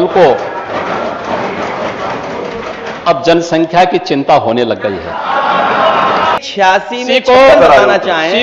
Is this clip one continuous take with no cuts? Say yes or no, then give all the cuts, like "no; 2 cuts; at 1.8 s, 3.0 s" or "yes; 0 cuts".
no; 1 cut; at 6.4 s